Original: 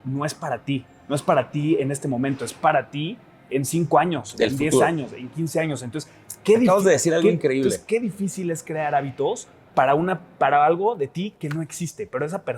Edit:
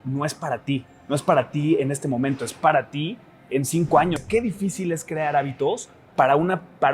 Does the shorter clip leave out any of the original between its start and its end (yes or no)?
yes